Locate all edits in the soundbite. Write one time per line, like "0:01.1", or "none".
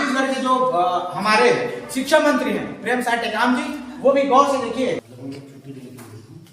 0:05.1